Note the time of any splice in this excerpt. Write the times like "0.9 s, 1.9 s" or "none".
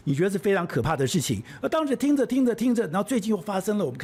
none